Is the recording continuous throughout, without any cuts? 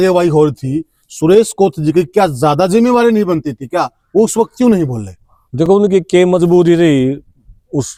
yes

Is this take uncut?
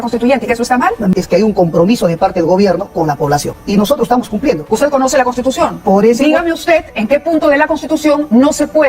no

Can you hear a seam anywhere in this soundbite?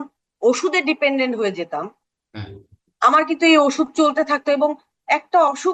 no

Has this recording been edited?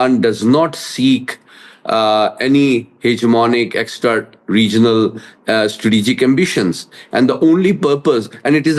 no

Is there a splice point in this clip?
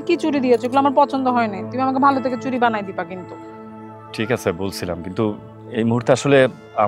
no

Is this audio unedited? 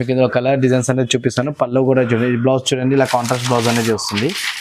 yes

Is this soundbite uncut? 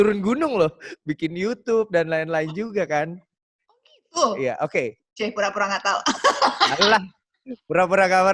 yes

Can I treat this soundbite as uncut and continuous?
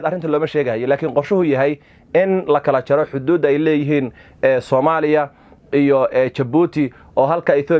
yes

